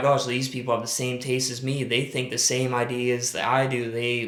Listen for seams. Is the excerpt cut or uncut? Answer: uncut